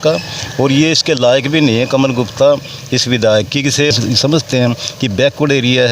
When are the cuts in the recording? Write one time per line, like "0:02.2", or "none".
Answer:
0:03.9

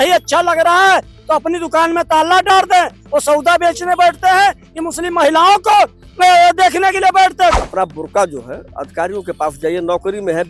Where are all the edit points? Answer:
0:07.6

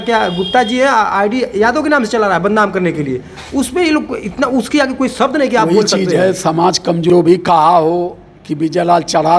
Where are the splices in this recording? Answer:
0:07.1

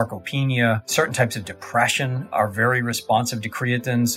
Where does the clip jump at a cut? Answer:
0:00.9
0:02.3

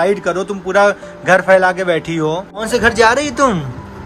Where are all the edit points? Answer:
0:02.7

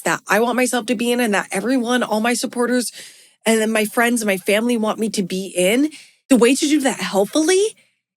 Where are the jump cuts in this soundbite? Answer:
0:06.1

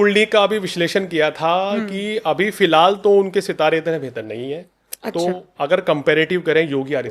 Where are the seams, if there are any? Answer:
none

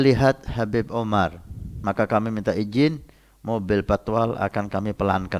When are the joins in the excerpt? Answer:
0:01.8

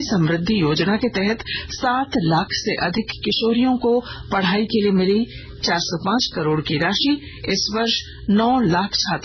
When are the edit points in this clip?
none

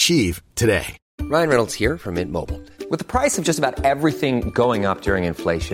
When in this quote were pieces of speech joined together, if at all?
0:01.0

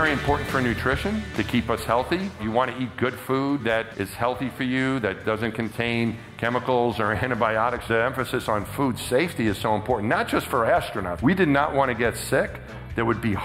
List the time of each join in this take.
0:07.9

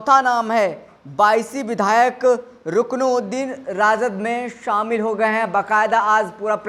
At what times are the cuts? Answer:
none

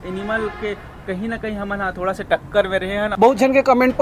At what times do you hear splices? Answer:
0:03.1

